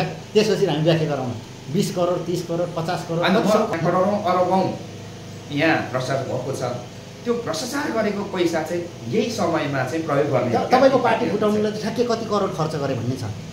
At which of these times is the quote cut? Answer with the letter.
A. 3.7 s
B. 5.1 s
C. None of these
A